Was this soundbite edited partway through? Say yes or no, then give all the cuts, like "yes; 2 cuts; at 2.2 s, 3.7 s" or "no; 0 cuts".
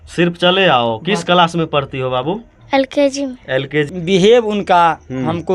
yes; 1 cut; at 3.9 s